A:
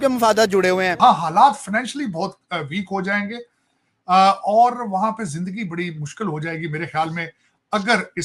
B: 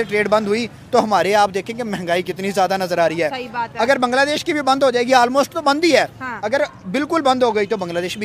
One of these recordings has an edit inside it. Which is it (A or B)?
A